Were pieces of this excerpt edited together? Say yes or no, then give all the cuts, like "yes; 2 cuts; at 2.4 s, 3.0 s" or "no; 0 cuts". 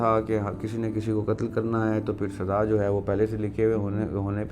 no; 0 cuts